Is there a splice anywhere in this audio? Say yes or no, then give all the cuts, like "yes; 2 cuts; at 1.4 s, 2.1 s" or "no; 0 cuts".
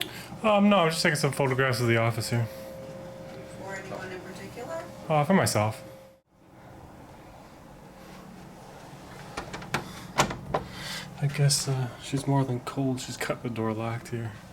yes; 1 cut; at 6.0 s